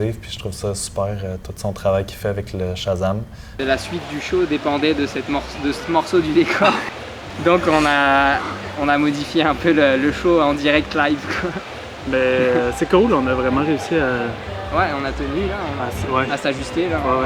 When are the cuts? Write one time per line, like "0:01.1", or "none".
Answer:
0:03.6